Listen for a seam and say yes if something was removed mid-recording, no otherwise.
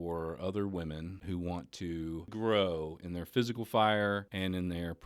yes